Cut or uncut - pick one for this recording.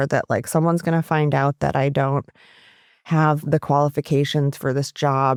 uncut